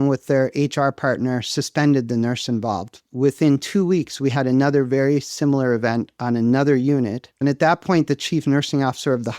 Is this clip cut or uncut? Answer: cut